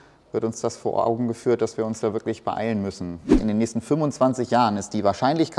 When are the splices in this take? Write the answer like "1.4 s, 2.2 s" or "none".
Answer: 3.4 s